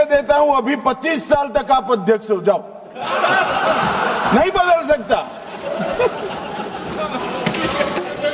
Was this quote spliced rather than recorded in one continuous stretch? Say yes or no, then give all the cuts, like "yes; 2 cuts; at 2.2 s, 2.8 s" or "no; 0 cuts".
no; 0 cuts